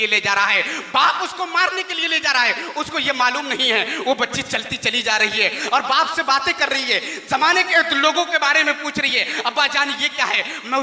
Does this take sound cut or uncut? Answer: uncut